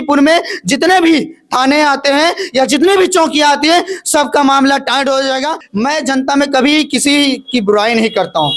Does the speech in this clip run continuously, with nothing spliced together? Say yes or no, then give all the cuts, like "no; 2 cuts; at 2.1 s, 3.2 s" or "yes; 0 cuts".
no; 1 cut; at 5.6 s